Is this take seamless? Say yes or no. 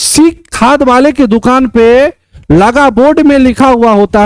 yes